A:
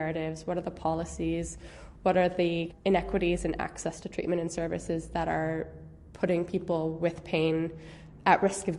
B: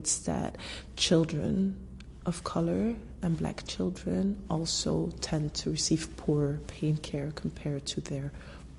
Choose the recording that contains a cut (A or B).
A